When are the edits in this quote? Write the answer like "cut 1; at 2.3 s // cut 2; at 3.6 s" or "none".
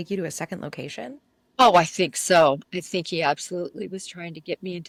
none